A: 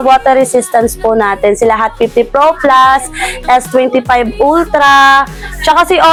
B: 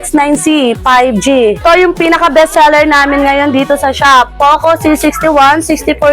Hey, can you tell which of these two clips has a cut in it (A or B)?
B